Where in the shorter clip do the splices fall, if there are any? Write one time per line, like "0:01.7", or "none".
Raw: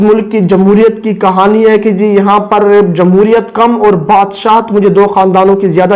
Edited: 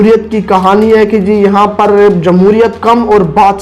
none